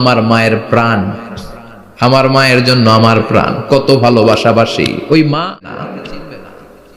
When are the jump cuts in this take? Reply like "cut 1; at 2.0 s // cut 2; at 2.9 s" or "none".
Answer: cut 1; at 5.6 s